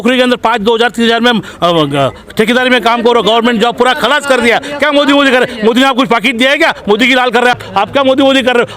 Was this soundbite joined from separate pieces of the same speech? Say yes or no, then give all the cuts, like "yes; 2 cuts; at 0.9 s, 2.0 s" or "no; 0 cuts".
yes; 1 cut; at 7.6 s